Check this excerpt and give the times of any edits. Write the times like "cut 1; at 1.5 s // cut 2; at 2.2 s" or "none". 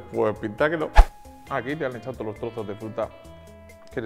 cut 1; at 1.1 s